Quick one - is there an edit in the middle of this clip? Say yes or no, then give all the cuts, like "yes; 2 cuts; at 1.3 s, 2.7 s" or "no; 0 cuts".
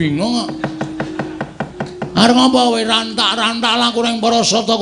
no; 0 cuts